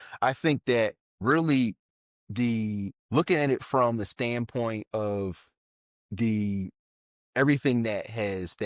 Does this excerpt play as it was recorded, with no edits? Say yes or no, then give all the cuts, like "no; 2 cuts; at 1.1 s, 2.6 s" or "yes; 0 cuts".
no; 2 cuts; at 1.1 s, 3.0 s